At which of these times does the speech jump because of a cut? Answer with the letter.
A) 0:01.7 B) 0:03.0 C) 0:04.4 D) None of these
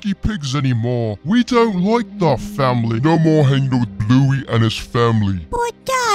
B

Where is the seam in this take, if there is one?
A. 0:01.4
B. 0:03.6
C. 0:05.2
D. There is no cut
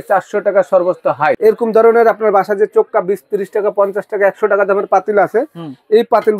A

